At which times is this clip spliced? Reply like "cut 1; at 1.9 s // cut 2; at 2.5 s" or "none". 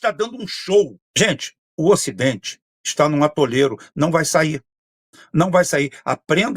cut 1; at 1.0 s